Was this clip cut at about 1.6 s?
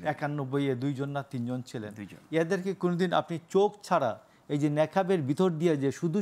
no; 0 cuts

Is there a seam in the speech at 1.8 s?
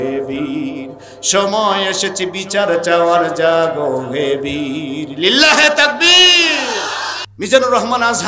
no; 1 cut; at 7.2 s

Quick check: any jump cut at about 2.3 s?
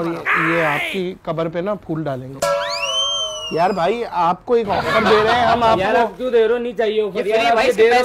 yes; 1 cut; at 2.3 s

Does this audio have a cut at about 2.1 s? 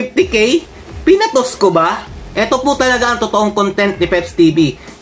yes; 1 cut; at 2.1 s

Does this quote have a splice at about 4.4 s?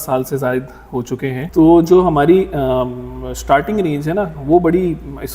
no; 1 cut; at 1.5 s

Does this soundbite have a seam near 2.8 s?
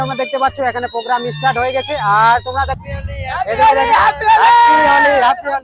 yes; 1 cut; at 2.8 s

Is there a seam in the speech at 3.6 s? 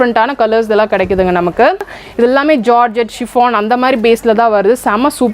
no; 1 cut; at 1.9 s

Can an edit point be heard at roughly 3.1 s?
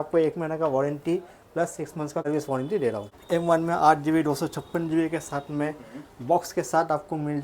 yes; 2 cuts; at 2.2 s, 3.1 s

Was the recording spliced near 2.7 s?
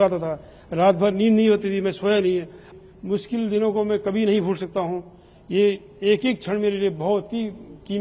yes; 1 cut; at 2.7 s

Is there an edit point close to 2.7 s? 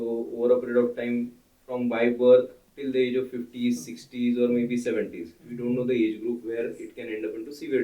yes; 1 cut; at 2.7 s

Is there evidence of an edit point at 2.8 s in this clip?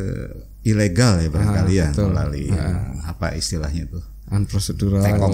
no; 0 cuts

